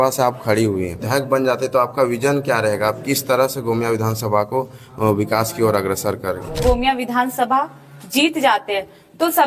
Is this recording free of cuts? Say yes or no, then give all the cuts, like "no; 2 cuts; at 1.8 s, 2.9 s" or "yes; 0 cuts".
no; 2 cuts; at 1.0 s, 6.6 s